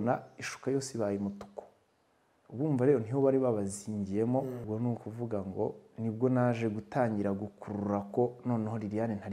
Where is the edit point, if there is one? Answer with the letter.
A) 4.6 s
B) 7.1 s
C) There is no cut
A